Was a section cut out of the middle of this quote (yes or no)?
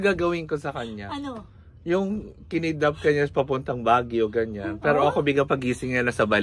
no